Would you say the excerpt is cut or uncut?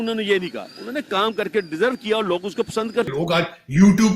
cut